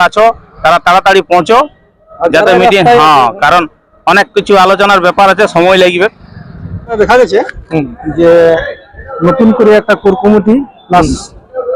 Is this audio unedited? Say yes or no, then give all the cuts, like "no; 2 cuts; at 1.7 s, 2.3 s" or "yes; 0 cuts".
no; 1 cut; at 7.0 s